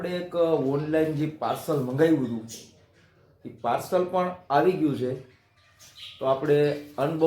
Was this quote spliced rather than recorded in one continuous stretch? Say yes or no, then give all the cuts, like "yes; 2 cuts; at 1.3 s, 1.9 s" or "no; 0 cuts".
no; 0 cuts